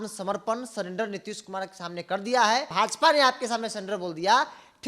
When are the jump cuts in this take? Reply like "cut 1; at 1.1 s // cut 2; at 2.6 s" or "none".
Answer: cut 1; at 2.7 s